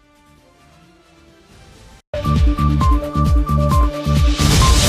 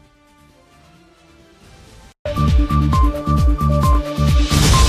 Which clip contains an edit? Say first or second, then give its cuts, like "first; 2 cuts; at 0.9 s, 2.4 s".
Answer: first; 1 cut; at 1.9 s